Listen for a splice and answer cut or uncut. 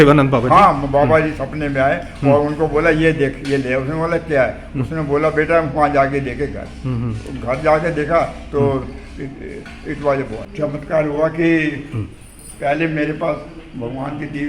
cut